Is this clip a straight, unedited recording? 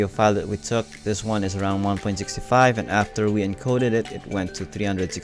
yes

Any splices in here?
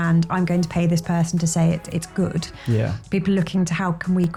no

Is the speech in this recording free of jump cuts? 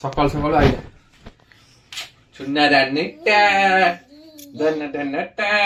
yes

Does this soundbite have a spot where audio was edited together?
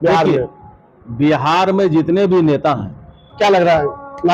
yes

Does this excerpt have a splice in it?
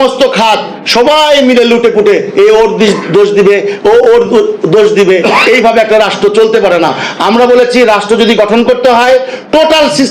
no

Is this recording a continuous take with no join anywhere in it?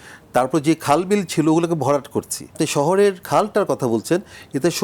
no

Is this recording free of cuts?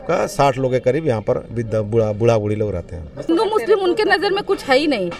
no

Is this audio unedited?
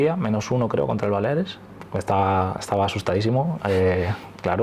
no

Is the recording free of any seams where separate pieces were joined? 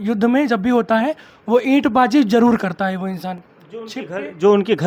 yes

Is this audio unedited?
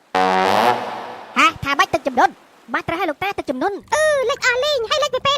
no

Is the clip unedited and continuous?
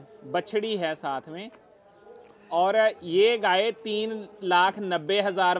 yes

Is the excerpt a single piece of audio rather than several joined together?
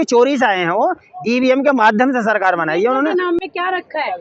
yes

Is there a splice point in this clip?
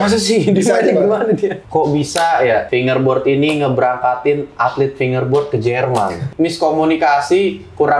yes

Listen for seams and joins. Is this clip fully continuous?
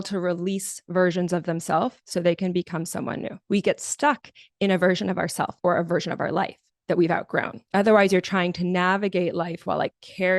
no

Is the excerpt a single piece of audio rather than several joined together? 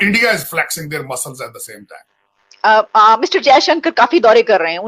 no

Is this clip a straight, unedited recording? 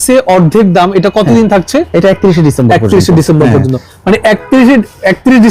yes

